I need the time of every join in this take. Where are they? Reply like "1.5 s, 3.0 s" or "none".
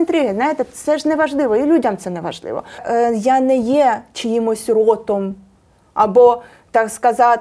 2.8 s